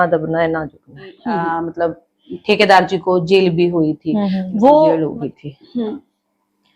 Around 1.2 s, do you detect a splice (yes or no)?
yes